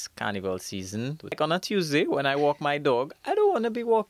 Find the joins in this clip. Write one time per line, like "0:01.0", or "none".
0:01.4